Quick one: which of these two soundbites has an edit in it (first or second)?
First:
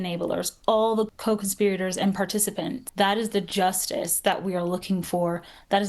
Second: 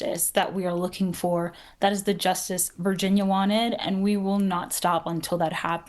first